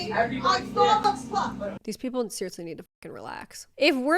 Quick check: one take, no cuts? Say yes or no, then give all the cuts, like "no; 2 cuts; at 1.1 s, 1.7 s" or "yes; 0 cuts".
no; 1 cut; at 1.8 s